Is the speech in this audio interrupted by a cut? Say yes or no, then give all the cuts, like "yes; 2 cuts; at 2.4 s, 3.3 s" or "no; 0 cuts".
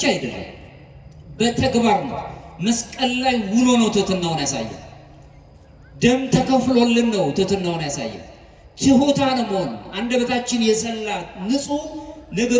no; 0 cuts